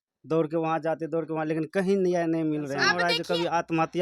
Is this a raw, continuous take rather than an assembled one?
no; 1 cut; at 2.9 s

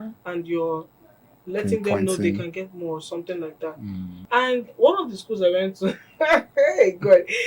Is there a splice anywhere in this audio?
yes; 1 cut; at 4.1 s

